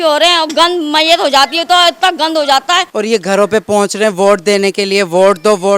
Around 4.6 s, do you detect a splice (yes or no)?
no